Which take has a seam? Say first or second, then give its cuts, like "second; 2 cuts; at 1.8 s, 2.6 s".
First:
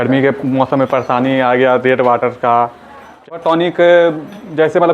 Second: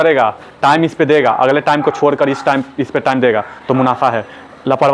first; 1 cut; at 3.3 s